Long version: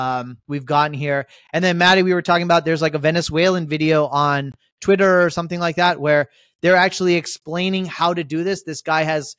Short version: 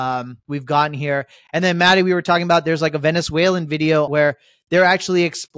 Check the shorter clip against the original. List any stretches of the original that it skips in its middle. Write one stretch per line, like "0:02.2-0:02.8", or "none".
0:04.1-0:06.0